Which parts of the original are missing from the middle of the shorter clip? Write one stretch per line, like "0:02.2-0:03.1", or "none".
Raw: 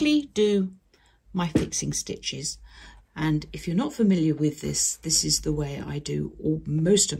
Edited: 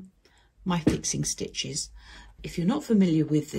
0:03.1-0:03.5

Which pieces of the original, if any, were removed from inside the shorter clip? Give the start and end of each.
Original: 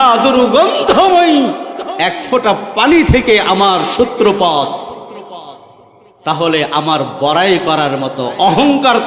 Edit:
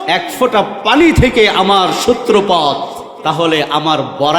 0:05.0-0:06.1

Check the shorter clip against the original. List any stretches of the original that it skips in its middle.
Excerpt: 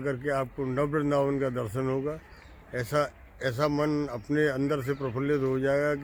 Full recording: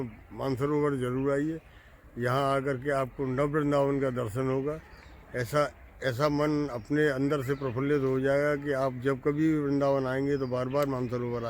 none

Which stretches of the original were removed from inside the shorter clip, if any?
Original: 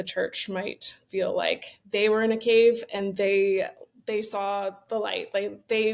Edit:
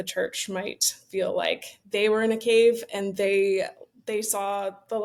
none

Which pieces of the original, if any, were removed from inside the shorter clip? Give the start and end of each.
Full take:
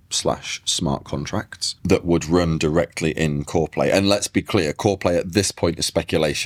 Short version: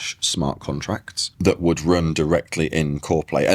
none

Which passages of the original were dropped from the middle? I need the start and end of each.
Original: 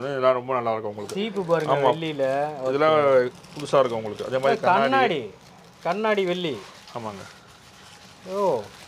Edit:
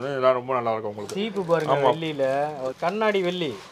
0:02.6-0:05.6

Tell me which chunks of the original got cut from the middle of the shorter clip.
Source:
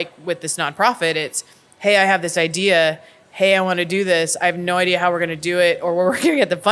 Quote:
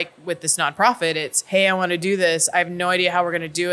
0:01.3-0:03.2

